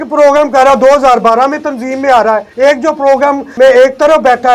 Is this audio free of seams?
no; 2 cuts; at 2.5 s, 3.5 s

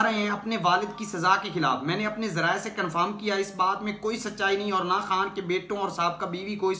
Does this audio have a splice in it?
no; 0 cuts

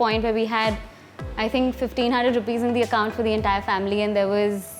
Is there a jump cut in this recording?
no; 0 cuts

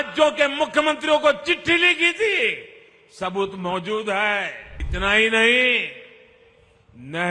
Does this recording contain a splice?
yes; 1 cut; at 4.8 s

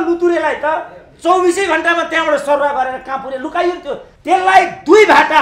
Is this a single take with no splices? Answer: no; 1 cut; at 4.1 s

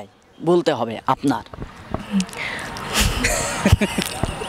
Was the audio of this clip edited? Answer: no; 0 cuts

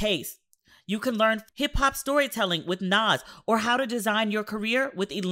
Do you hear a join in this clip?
yes; 1 cut; at 1.4 s

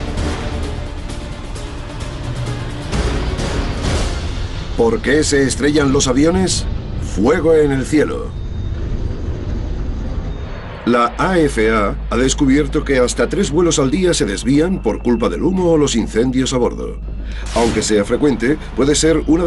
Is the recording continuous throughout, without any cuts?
no; 1 cut; at 17.0 s

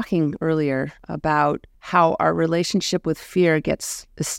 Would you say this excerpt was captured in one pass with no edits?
no; 2 cuts; at 1.0 s, 1.7 s

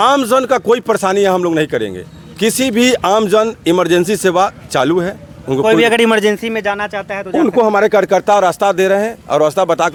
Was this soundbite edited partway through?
no; 0 cuts

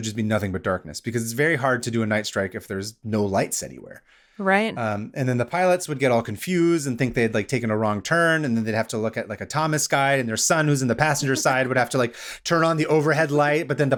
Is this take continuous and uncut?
yes; 0 cuts

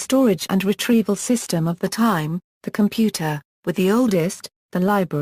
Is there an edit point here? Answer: yes; 1 cut; at 2.1 s

